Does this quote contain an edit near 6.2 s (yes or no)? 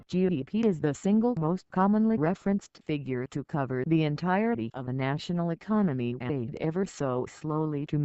no